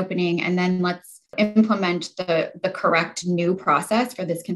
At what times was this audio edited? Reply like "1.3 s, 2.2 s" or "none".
1.3 s